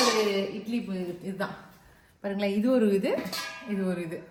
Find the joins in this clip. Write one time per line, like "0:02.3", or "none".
none